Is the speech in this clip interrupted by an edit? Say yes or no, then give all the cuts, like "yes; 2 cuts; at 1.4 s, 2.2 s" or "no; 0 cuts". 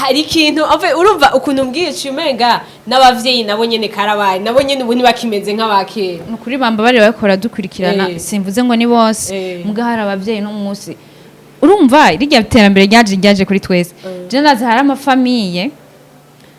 no; 0 cuts